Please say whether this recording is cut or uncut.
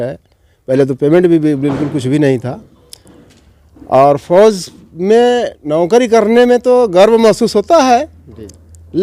uncut